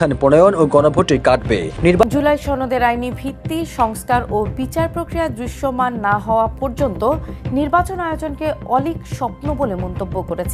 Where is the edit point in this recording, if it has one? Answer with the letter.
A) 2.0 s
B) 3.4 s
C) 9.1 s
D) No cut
A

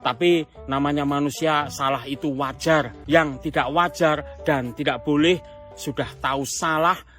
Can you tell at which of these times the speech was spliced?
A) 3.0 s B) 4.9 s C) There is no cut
A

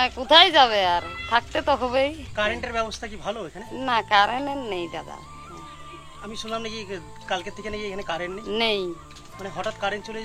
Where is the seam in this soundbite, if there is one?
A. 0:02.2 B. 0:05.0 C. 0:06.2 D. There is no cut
A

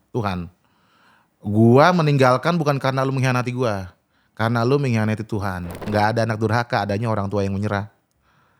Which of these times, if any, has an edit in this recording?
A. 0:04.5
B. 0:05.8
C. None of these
B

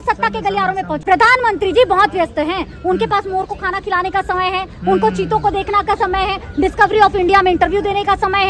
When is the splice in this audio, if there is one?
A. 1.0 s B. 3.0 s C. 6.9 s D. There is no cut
A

